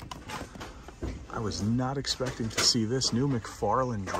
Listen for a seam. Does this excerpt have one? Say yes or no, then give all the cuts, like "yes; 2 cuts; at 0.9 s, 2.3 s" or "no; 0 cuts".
no; 0 cuts